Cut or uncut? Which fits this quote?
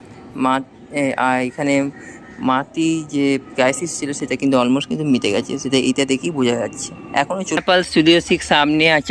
cut